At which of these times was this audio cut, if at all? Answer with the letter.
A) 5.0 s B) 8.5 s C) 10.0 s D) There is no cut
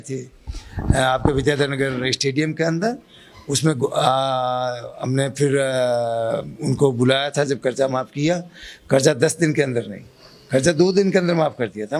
D